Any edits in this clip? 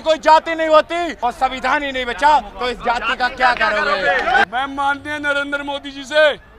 yes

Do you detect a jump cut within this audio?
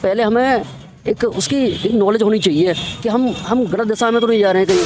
no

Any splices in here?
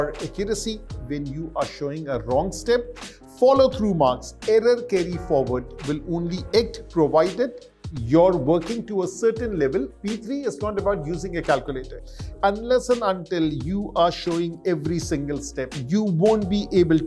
yes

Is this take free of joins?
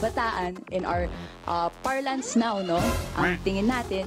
yes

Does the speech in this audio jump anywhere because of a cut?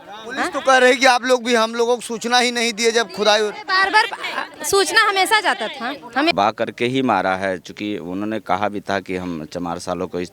yes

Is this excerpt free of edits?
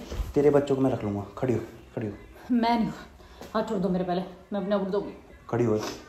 yes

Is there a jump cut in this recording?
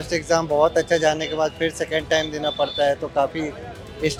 no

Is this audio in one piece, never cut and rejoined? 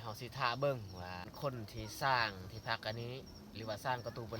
no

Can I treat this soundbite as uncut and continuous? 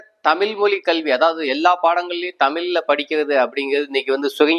yes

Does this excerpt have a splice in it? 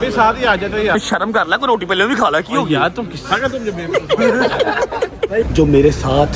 yes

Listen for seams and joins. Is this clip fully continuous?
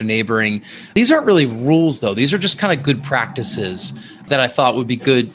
no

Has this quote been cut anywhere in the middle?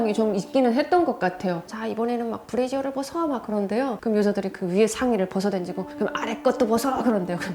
yes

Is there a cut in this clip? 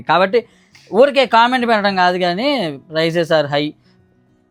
no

